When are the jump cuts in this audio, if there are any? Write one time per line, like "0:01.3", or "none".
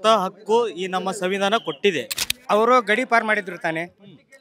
0:02.4